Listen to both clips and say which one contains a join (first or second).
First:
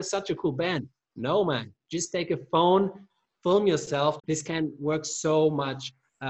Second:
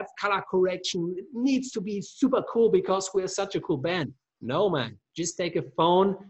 first